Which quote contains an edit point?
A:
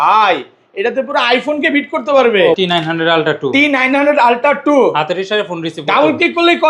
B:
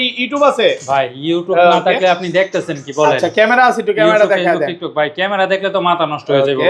A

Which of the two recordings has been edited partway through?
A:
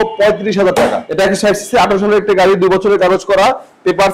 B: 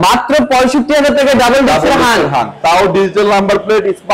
A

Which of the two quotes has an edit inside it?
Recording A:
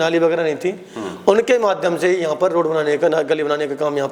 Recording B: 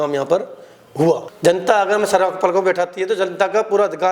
B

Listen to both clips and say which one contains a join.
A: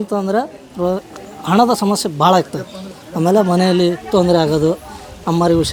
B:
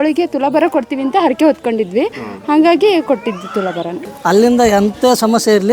B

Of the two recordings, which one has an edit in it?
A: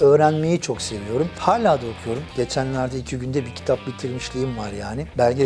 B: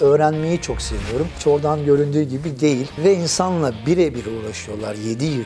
B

